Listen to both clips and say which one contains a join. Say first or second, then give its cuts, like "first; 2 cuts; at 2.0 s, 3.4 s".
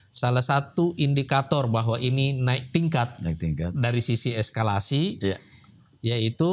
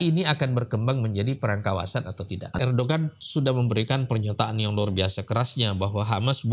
second; 1 cut; at 2.5 s